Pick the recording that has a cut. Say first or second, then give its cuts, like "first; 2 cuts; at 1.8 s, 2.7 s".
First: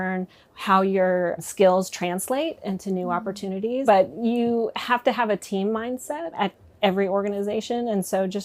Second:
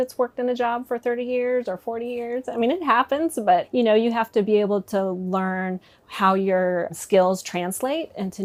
first; 2 cuts; at 3.8 s, 6.3 s